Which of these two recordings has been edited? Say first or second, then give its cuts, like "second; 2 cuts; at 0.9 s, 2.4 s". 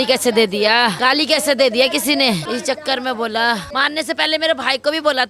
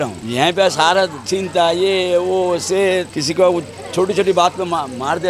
first; 3 cuts; at 1.0 s, 2.4 s, 3.7 s